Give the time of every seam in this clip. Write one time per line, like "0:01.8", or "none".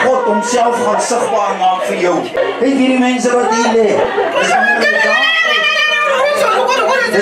0:02.4

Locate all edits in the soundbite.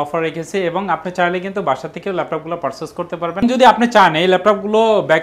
0:03.4

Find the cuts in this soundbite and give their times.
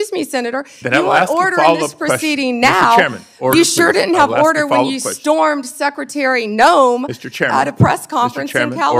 none

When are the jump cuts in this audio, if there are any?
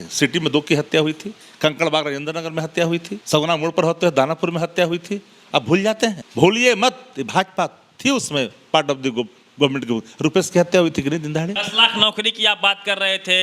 0:03.1
0:06.2
0:11.6

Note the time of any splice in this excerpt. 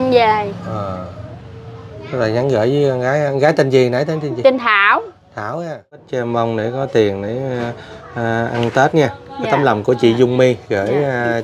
0:06.1

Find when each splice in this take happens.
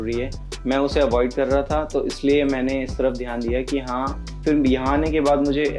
0:04.4

